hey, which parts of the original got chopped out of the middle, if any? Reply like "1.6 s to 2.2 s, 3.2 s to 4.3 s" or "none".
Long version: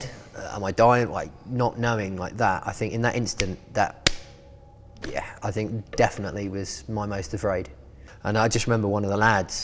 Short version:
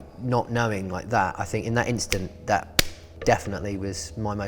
4.4 s to 5.8 s